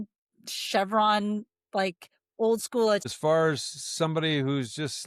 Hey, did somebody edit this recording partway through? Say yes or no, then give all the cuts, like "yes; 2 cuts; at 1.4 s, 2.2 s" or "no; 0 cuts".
yes; 1 cut; at 3.1 s